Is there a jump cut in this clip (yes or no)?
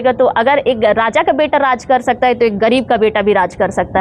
no